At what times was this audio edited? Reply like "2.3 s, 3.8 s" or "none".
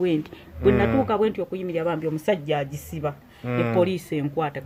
none